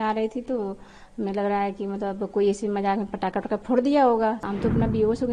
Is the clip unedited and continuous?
no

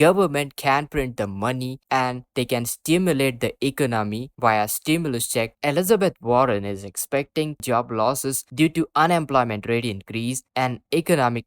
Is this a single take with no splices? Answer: no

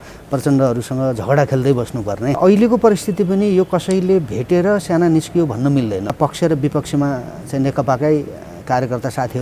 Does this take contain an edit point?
yes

